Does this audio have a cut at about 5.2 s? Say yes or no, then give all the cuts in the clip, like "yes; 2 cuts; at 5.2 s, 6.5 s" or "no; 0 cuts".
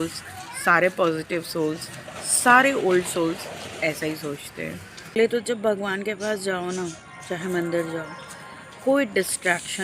yes; 1 cut; at 5.2 s